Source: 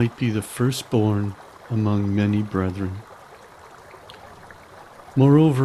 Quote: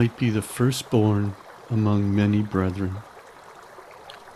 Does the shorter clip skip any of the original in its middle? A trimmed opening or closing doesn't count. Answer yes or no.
yes